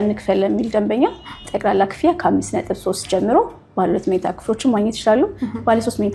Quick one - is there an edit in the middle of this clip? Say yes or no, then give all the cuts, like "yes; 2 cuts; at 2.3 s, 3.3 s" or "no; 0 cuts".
no; 0 cuts